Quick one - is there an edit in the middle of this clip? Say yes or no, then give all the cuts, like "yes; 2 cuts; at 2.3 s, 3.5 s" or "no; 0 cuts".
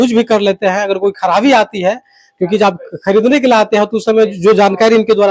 no; 0 cuts